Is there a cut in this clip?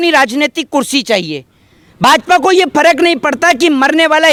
no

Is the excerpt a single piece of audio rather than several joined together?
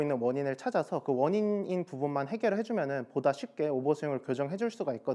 yes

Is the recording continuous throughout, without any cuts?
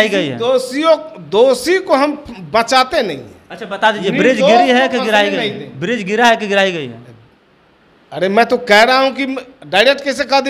yes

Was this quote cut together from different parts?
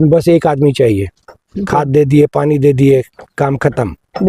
no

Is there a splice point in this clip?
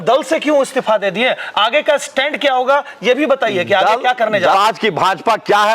yes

